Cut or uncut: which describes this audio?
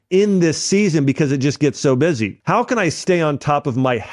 cut